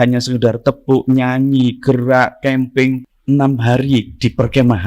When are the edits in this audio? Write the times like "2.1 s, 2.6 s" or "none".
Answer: 3.0 s